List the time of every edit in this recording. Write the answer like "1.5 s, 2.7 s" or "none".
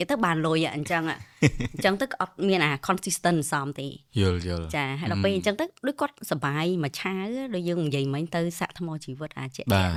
none